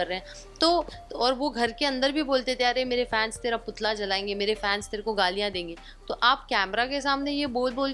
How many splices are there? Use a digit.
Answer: 1